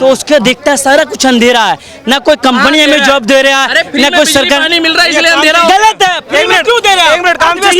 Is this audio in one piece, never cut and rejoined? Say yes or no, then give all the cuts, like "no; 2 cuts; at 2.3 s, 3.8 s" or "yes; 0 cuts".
yes; 0 cuts